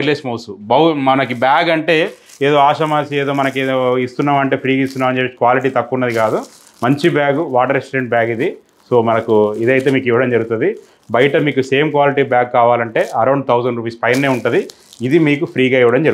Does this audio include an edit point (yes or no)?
no